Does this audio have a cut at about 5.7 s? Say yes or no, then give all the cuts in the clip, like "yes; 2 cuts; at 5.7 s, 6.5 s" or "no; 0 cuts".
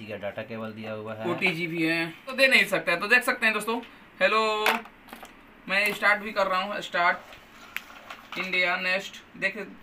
no; 1 cut; at 2.4 s